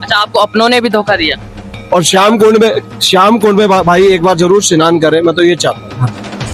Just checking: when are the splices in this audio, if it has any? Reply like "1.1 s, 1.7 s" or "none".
1.7 s